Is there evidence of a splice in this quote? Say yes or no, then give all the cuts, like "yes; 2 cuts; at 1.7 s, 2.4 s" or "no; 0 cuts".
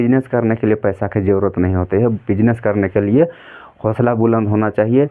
no; 0 cuts